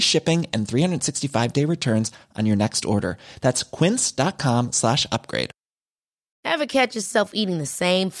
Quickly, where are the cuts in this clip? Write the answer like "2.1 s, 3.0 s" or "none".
6.2 s